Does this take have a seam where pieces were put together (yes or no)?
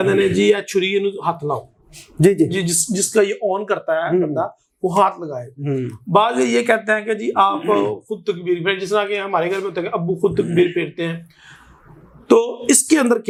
no